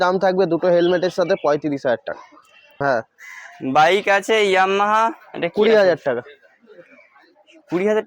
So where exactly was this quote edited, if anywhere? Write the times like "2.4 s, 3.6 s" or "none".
2.7 s